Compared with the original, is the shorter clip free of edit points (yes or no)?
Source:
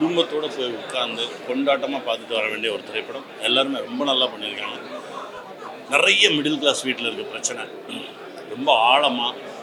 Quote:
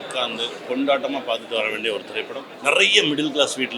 no